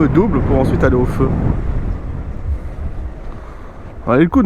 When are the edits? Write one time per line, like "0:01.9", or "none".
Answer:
0:03.1